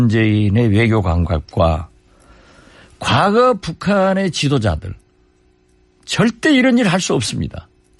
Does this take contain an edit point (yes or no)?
no